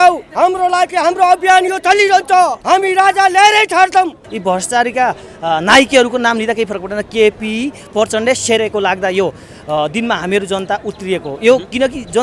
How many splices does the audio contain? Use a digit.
2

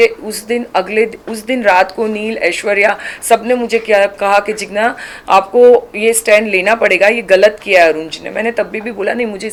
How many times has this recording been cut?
0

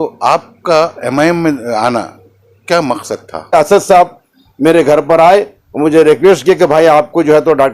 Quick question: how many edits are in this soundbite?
1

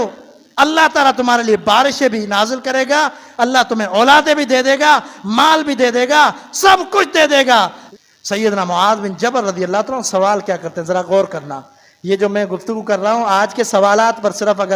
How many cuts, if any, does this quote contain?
1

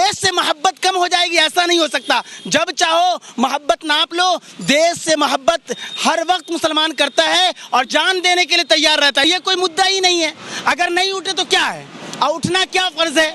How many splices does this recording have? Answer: 1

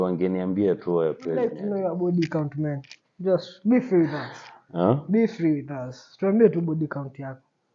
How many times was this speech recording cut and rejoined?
1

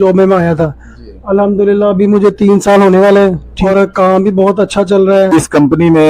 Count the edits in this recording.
2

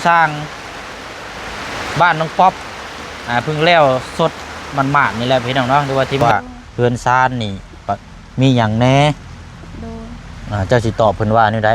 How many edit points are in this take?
1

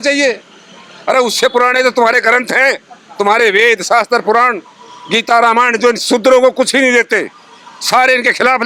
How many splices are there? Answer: 0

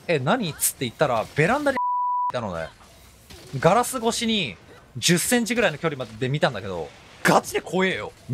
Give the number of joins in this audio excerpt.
1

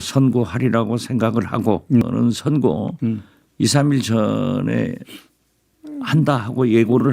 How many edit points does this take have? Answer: 1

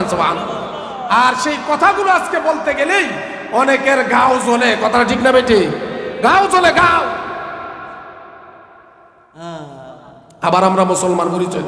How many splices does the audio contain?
0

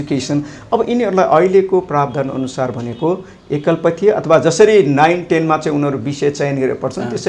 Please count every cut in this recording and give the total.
0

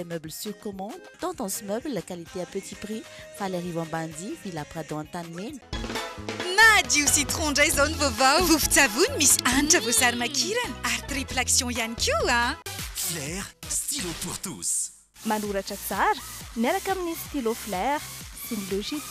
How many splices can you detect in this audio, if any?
1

